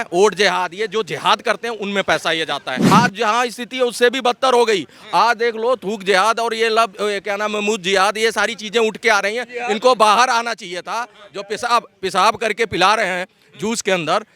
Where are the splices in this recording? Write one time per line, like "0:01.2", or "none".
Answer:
0:02.8